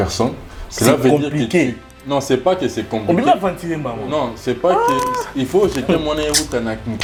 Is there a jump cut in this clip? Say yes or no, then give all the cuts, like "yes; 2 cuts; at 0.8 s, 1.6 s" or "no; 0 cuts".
no; 0 cuts